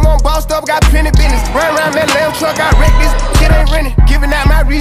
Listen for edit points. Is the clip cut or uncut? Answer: uncut